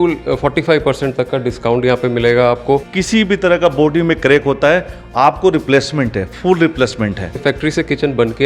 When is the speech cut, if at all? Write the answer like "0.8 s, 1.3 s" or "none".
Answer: 2.9 s, 7.4 s